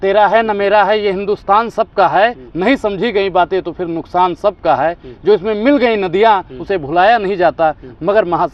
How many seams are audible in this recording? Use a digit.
0